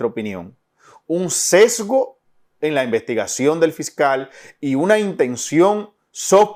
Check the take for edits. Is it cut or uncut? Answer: uncut